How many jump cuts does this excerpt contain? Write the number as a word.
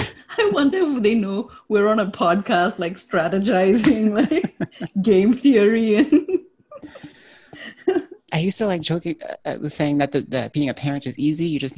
zero